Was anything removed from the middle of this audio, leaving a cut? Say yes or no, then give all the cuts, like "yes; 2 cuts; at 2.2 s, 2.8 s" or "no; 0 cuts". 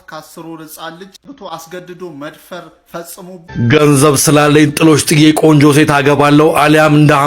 yes; 2 cuts; at 1.2 s, 3.4 s